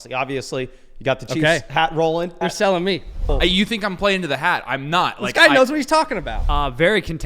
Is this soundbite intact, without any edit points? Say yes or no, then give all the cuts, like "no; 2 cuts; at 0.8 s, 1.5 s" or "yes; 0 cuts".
no; 3 cuts; at 2.4 s, 3.3 s, 6.4 s